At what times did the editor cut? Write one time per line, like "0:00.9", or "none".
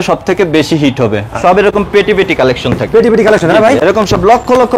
0:01.3